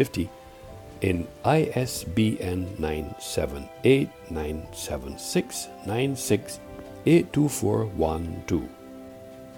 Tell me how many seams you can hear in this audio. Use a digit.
1